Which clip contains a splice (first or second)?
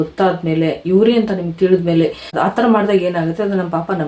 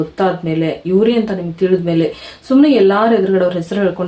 first